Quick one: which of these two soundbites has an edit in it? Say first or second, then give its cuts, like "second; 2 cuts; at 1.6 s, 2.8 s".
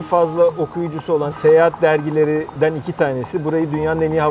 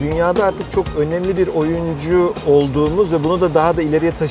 first; 2 cuts; at 1.3 s, 2.5 s